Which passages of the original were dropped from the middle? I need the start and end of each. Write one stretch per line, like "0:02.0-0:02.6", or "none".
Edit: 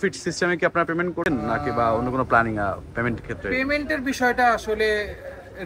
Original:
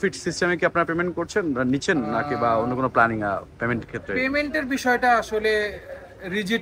0:01.3-0:01.9